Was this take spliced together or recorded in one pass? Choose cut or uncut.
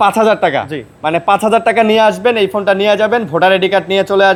uncut